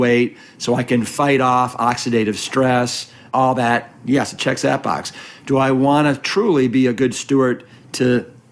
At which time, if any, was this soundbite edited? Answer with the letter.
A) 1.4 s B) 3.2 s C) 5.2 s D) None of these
B